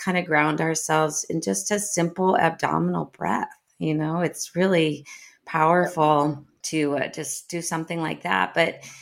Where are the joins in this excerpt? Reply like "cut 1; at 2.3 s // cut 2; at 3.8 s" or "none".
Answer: cut 1; at 6.5 s